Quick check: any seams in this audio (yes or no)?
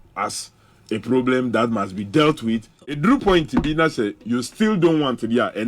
yes